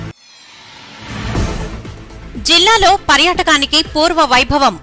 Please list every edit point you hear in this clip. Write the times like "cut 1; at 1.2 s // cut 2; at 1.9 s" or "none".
cut 1; at 1.7 s